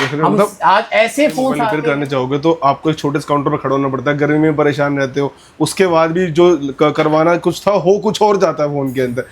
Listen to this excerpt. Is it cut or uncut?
cut